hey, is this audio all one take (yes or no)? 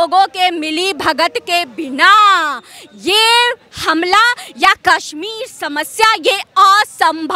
yes